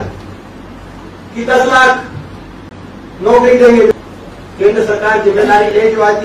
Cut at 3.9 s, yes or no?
yes